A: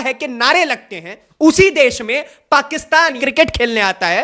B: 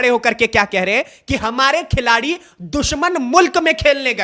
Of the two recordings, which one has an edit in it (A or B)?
A